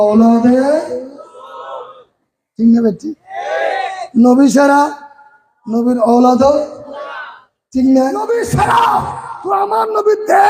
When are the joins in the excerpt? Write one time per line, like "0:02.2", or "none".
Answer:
0:08.3